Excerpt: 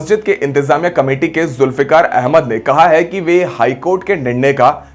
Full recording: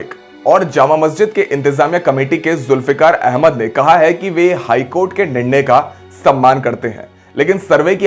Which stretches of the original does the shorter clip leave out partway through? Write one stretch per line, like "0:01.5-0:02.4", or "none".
none

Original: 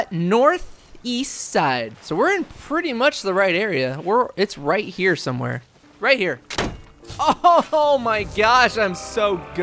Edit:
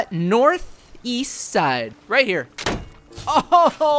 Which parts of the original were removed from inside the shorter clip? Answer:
0:01.9-0:05.9

